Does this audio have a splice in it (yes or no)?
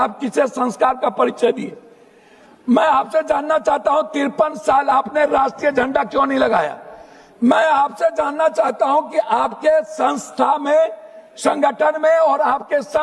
no